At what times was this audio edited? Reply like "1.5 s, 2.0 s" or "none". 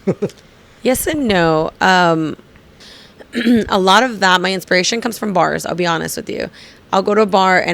2.8 s